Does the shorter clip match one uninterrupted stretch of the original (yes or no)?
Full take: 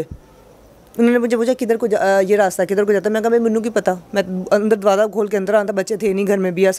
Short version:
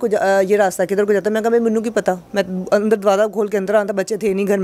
yes